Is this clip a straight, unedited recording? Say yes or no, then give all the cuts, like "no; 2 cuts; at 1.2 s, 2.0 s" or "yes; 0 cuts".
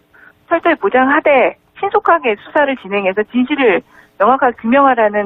yes; 0 cuts